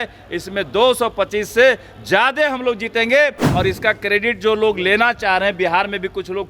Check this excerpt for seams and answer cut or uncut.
cut